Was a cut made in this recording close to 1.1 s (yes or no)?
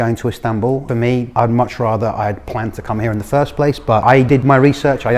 yes